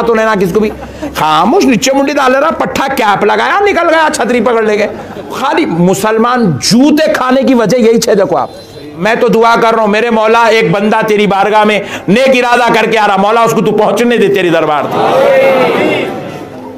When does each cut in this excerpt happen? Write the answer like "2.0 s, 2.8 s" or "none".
5.4 s, 9.0 s